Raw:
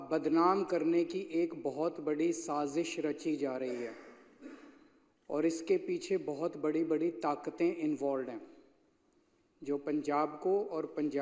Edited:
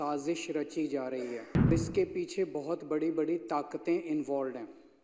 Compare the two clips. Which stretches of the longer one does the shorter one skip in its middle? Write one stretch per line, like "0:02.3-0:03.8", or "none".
0:04.2-0:05.4